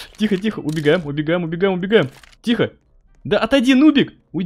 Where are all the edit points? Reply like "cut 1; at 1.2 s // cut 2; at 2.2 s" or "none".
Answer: none